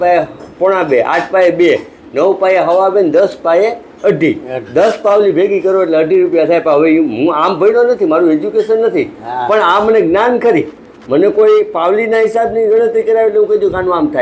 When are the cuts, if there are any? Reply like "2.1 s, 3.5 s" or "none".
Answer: none